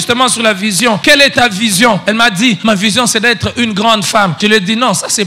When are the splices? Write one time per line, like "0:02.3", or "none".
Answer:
0:01.0
0:02.4
0:04.4